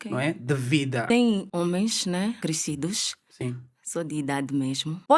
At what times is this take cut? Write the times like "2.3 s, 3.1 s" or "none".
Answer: 1.0 s